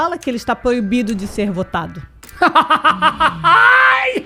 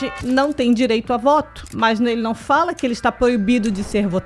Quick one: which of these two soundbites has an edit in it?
second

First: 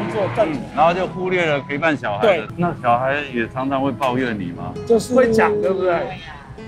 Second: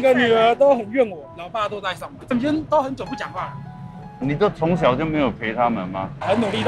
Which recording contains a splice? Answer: first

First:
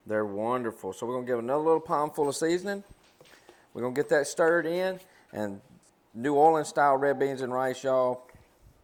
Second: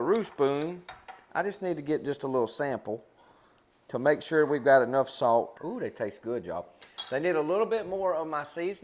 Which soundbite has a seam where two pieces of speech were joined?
second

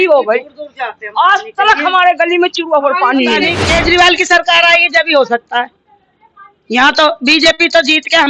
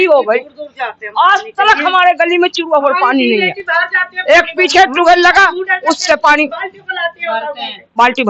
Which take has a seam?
first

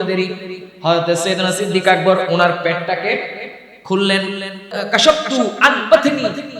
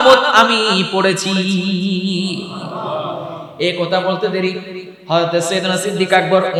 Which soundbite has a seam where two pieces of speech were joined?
first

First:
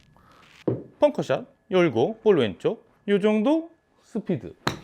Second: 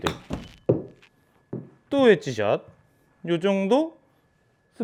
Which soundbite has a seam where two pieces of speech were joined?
first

